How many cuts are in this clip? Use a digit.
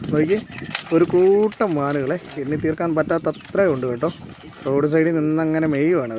0